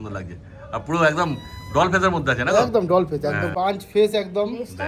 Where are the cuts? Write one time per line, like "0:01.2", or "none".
0:03.5